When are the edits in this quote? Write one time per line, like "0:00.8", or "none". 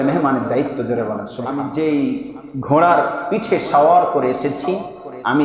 0:01.4